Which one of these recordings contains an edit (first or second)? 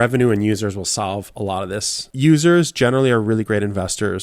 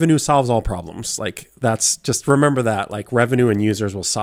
first